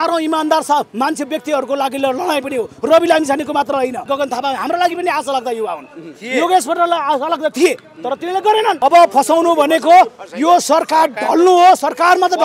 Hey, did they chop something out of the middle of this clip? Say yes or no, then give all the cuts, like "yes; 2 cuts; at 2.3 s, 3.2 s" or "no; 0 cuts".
yes; 2 cuts; at 4.0 s, 8.8 s